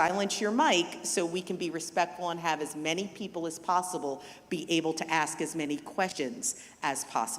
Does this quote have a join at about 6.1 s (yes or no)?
yes